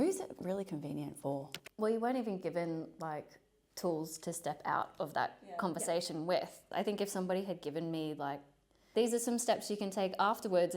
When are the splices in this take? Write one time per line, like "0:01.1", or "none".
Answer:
0:01.6
0:06.6
0:08.9